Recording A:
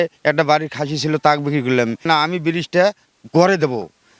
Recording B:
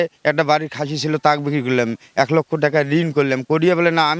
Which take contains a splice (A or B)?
A